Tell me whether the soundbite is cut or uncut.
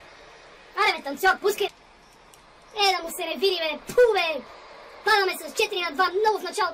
uncut